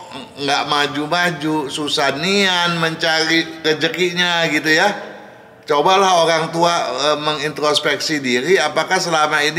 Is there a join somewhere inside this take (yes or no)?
no